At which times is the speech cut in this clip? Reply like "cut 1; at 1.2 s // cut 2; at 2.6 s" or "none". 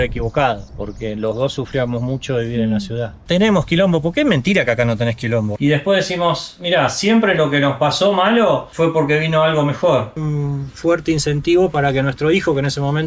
cut 1; at 3.1 s // cut 2; at 5.5 s // cut 3; at 10.2 s